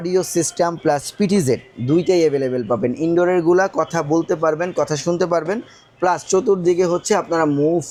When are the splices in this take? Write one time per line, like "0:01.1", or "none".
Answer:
none